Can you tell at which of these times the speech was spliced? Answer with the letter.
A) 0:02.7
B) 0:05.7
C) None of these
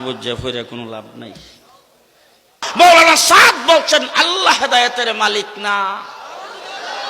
A